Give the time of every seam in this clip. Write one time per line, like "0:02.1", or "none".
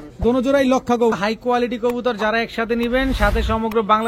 0:01.2

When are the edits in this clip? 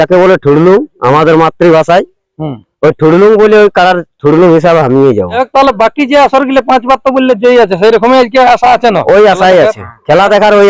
0:05.4

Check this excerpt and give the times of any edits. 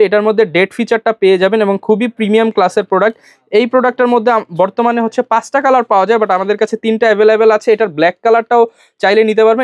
none

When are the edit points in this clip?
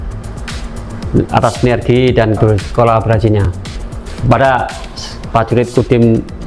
0:02.4

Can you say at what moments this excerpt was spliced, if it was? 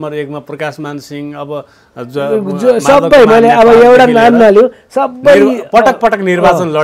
none

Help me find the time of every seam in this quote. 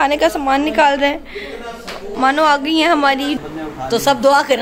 0:03.4

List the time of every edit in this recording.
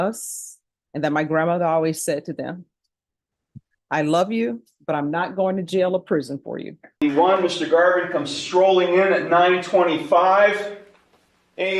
0:07.0

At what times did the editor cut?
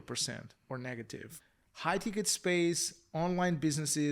0:01.3

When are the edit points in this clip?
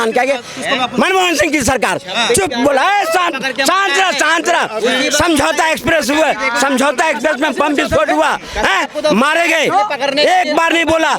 none

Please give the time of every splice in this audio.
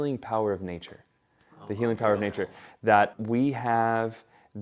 0:03.1

